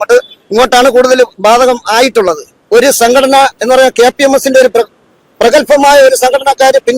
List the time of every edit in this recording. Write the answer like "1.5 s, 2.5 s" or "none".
2.6 s